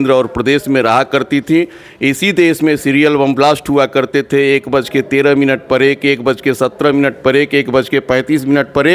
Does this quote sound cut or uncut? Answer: uncut